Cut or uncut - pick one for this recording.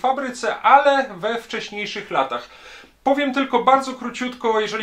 uncut